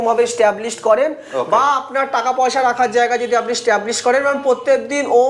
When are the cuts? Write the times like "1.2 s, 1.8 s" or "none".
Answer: none